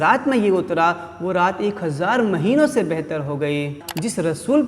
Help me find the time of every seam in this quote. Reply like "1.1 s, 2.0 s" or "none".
3.8 s